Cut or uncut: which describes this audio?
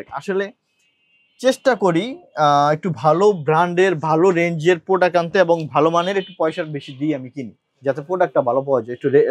uncut